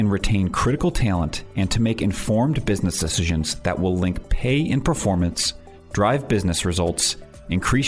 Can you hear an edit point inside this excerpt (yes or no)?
no